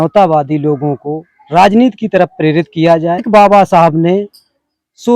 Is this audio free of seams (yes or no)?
no